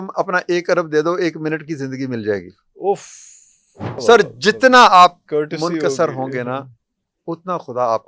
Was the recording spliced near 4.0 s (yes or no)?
yes